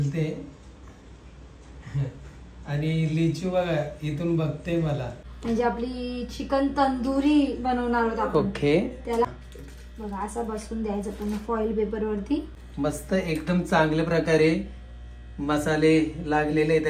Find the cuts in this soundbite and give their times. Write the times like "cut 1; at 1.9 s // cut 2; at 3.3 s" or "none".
cut 1; at 5.2 s // cut 2; at 9.3 s // cut 3; at 12.5 s